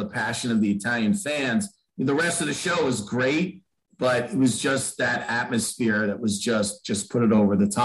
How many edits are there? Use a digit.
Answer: 0